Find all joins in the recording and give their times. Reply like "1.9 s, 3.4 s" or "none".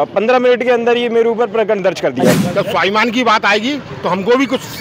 2.4 s